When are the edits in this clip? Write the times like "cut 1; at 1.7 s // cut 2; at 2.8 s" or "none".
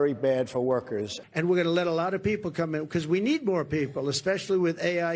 cut 1; at 1.1 s